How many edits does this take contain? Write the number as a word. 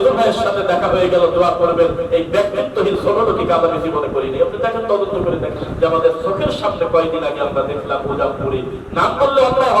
one